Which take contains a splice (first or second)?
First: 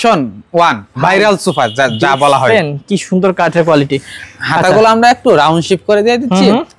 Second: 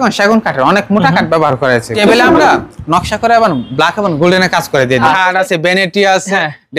second